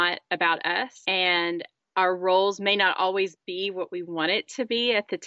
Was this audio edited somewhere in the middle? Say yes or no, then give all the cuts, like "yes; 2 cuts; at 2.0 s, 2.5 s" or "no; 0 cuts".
no; 0 cuts